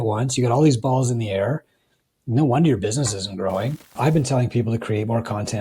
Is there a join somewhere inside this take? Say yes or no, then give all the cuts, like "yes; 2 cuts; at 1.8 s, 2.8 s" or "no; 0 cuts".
yes; 1 cut; at 3.9 s